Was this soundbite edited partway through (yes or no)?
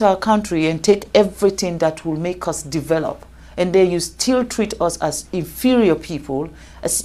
no